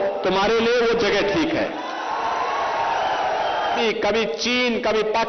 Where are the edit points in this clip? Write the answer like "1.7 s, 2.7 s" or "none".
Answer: 3.8 s